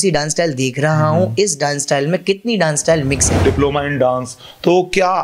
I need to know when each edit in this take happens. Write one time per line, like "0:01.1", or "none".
0:03.4